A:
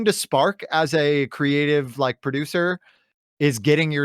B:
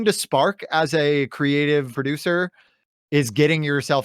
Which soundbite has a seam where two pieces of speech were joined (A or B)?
B